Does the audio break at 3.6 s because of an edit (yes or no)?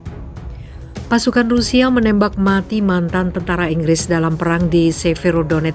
no